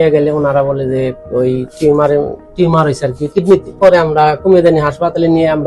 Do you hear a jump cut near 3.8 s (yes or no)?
yes